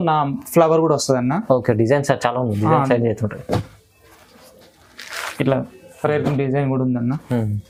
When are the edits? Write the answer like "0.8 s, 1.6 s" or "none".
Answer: none